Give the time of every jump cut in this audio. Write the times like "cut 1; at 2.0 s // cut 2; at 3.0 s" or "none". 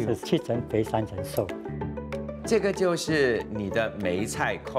cut 1; at 2.1 s // cut 2; at 3.5 s